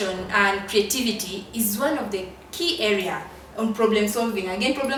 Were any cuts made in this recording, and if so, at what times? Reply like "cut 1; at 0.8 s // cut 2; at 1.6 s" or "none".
none